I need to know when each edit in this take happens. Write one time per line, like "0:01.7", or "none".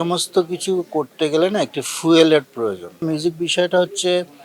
0:03.0